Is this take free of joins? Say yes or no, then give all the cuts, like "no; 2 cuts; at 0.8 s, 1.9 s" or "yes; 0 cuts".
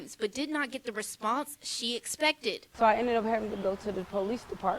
no; 1 cut; at 2.7 s